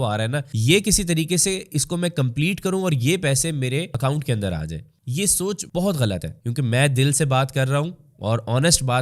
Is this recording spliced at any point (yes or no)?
yes